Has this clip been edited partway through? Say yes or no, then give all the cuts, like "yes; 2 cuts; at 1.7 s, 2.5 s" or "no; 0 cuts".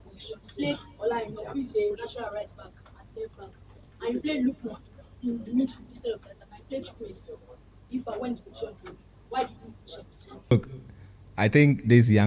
yes; 1 cut; at 10.5 s